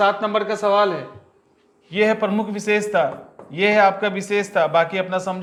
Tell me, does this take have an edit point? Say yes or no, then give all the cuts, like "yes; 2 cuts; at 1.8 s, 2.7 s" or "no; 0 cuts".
no; 0 cuts